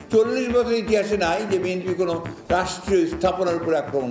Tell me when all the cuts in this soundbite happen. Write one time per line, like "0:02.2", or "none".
none